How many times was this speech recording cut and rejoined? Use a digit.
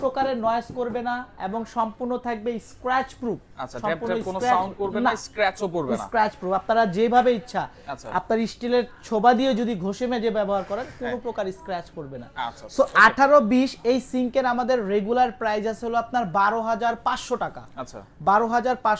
0